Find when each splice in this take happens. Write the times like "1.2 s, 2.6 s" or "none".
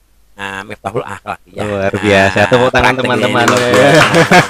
none